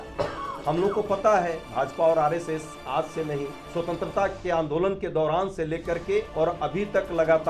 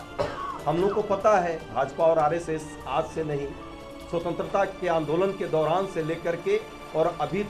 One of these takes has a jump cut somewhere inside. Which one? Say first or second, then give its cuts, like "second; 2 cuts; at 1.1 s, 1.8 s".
first; 2 cuts; at 3.6 s, 6.3 s